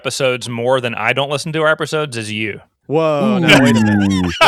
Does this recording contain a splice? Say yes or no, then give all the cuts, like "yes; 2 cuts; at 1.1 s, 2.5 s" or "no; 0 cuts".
yes; 1 cut; at 2.7 s